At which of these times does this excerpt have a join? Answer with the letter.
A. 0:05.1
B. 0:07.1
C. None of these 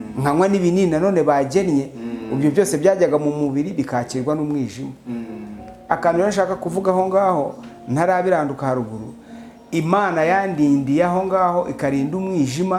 C